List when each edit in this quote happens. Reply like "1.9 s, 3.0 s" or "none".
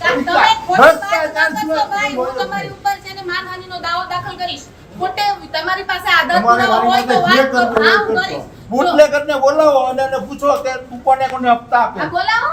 none